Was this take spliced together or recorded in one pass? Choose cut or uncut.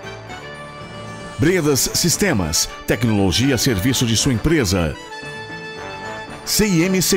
cut